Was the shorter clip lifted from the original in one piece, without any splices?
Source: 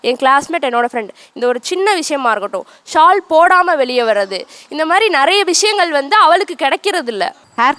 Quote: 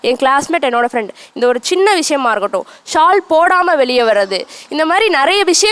yes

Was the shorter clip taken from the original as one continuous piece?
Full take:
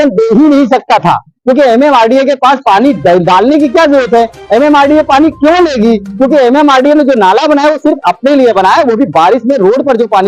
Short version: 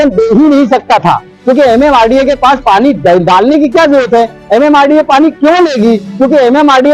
yes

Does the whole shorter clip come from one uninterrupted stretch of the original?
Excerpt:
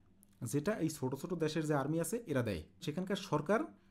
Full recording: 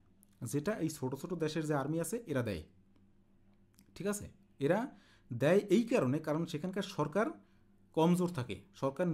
no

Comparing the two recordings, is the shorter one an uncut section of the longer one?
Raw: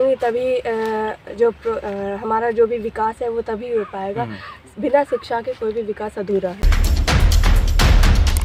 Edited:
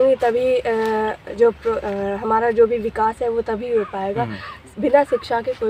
yes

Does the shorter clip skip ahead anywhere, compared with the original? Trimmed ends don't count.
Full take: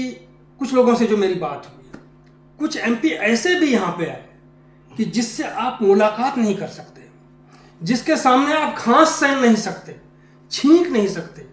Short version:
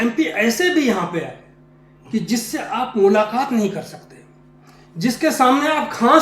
no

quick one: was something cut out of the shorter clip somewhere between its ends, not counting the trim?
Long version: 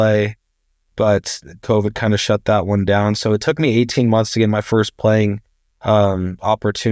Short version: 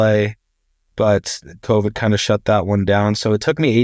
no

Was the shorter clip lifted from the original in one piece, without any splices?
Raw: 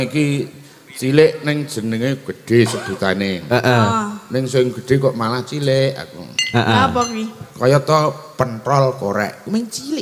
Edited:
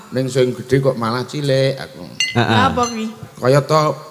yes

